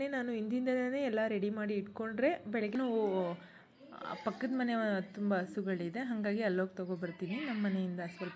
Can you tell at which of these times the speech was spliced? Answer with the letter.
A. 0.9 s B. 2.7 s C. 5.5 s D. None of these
B